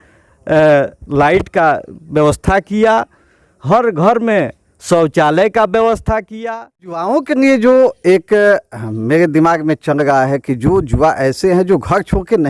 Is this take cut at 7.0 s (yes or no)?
yes